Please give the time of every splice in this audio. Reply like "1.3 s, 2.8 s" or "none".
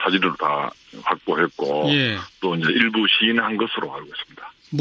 none